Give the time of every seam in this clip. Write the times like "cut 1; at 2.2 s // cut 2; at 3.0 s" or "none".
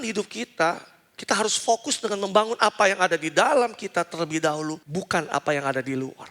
cut 1; at 4.8 s